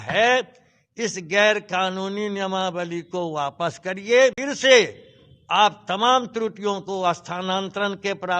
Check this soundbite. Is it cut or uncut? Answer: cut